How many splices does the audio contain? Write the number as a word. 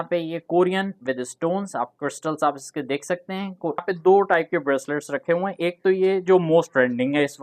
one